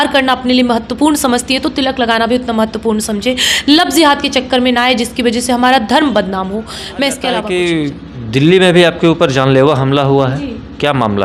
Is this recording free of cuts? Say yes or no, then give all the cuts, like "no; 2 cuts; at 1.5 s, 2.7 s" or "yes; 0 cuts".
yes; 0 cuts